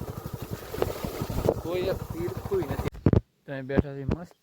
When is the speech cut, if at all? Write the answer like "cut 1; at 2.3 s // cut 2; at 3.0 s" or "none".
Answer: cut 1; at 2.9 s